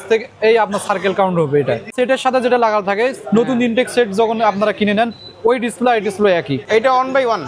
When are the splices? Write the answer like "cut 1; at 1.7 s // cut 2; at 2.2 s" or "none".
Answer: cut 1; at 1.9 s // cut 2; at 6.6 s